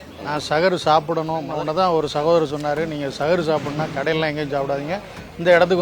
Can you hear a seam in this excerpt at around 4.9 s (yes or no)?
no